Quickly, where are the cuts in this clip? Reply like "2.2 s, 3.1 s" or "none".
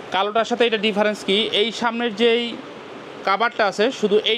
none